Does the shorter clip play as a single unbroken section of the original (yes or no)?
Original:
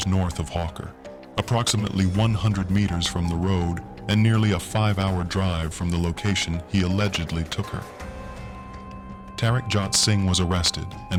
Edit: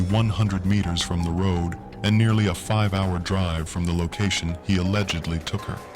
yes